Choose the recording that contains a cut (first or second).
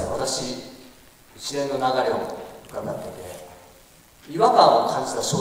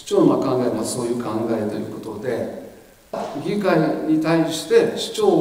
second